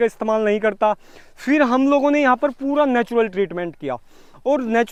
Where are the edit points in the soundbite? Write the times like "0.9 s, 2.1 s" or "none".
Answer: none